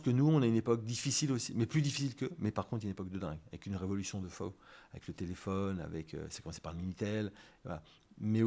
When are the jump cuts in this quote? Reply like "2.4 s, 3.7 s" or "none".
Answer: none